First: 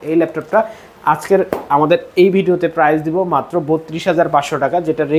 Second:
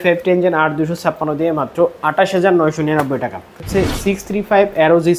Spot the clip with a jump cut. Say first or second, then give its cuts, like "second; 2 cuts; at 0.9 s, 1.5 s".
second; 1 cut; at 3.6 s